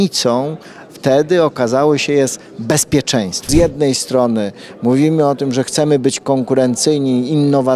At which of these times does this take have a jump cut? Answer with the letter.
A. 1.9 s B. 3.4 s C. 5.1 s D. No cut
B